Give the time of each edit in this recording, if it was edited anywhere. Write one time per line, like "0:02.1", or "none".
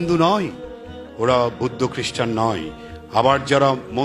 none